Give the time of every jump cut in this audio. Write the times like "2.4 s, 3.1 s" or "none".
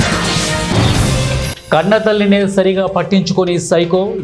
1.5 s